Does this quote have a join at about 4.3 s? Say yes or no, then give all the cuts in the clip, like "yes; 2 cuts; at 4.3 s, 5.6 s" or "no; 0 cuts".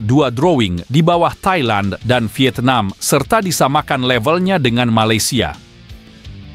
no; 1 cut; at 5.6 s